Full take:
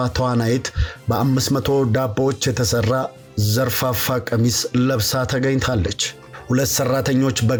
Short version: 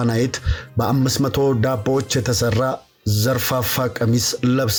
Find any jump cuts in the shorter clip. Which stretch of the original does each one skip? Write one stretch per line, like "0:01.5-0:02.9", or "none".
none